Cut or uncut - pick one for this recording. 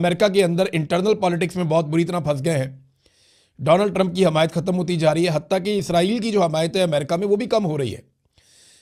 uncut